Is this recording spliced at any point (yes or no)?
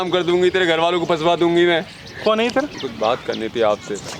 yes